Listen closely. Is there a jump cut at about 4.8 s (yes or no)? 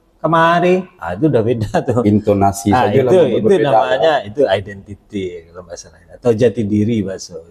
no